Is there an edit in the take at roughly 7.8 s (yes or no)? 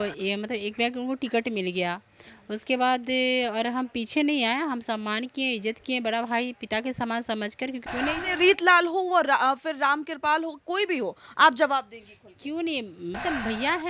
yes